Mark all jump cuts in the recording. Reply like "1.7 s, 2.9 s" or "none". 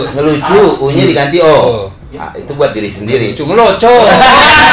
none